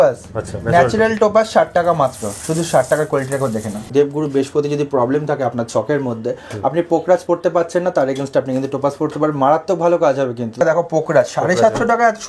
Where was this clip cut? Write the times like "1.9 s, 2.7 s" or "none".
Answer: 3.9 s, 10.6 s